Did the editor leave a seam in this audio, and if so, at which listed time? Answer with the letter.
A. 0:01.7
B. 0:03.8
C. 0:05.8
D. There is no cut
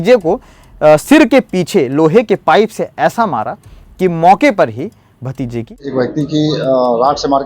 C